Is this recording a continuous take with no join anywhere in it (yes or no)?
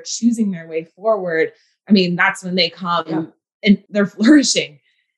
no